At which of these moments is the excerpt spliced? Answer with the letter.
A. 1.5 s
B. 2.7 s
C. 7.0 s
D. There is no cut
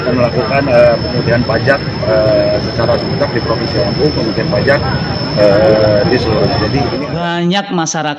C